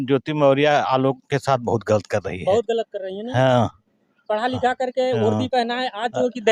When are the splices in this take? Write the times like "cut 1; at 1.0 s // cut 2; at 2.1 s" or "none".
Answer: none